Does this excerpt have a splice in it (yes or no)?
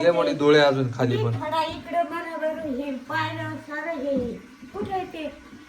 no